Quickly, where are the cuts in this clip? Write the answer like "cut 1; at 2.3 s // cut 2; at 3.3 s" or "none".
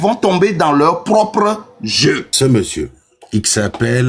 cut 1; at 2.3 s